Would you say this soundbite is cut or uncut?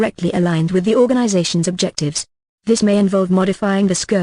cut